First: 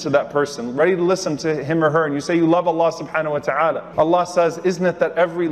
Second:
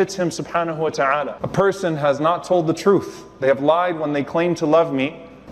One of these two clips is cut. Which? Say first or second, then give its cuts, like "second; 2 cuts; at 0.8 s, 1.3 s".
second; 1 cut; at 1.4 s